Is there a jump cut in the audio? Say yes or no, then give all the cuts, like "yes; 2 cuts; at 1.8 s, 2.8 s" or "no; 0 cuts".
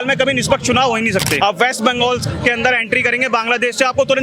yes; 1 cut; at 1.4 s